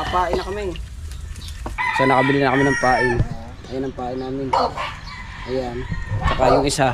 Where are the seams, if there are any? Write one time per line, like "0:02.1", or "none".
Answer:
0:01.7

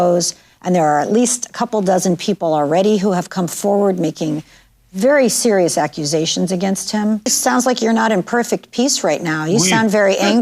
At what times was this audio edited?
0:07.4

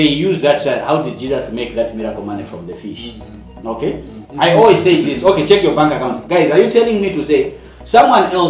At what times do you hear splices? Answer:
0:04.2

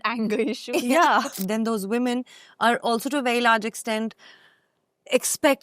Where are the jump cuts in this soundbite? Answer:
0:01.3

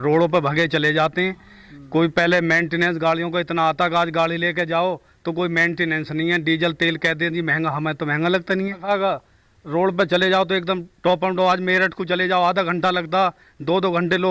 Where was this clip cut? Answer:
0:08.8

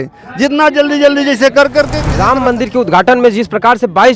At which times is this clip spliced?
0:02.0

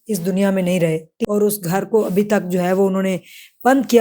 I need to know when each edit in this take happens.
0:01.1

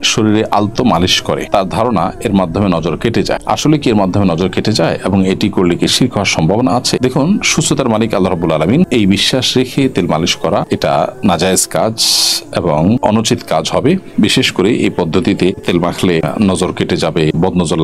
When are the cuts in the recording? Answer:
none

